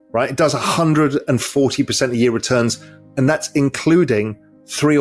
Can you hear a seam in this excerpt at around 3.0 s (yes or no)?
no